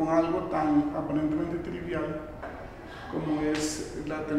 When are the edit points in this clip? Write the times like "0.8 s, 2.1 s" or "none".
2.9 s